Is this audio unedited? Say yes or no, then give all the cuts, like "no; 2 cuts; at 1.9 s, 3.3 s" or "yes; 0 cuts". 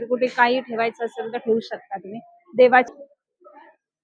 no; 1 cut; at 2.9 s